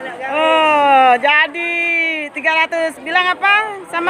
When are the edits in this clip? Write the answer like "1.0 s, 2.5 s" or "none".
none